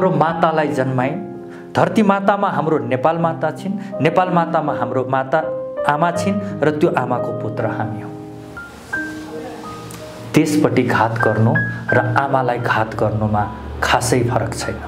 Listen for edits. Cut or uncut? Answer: uncut